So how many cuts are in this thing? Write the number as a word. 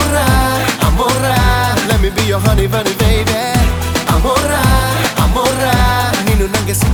zero